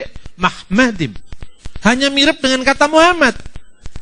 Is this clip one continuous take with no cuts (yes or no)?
yes